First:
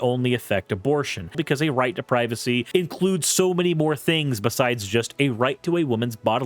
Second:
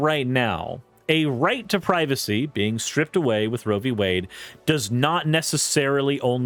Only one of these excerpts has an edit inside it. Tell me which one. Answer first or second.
first